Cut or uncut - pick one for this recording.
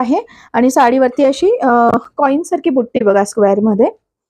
uncut